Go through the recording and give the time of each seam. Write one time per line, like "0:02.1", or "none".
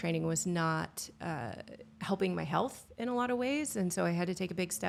none

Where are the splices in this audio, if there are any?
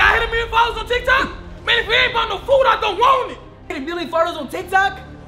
0:03.6

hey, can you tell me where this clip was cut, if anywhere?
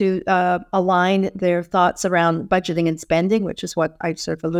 none

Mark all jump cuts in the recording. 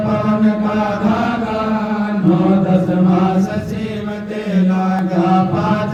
none

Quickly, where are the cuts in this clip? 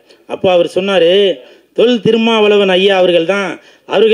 none

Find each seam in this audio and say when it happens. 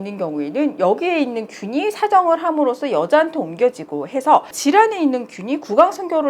0:04.5

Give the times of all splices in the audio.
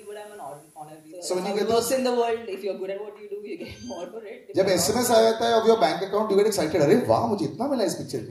0:01.0

